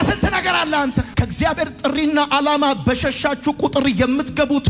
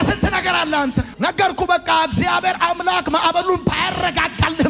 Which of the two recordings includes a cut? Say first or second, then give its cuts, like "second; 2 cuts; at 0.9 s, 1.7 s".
first; 1 cut; at 1.1 s